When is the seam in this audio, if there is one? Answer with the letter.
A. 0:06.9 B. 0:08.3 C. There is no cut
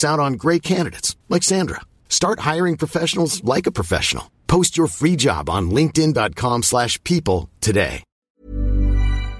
B